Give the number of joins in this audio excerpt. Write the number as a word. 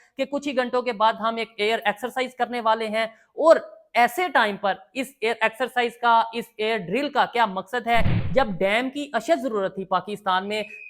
one